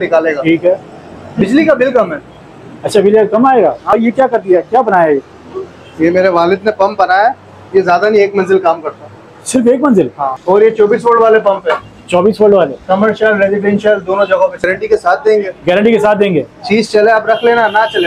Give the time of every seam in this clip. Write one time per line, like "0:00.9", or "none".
0:03.9
0:10.3
0:14.6